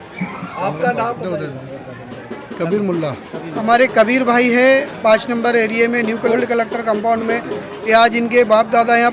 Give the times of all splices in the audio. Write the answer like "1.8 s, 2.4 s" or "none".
3.5 s, 6.3 s